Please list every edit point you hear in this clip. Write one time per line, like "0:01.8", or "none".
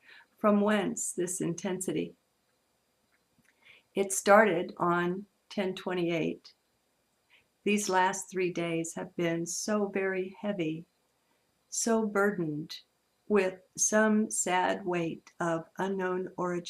0:13.8